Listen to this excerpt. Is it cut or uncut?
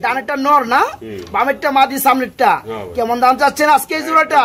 uncut